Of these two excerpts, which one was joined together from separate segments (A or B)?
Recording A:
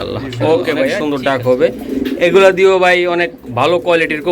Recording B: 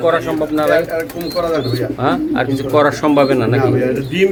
A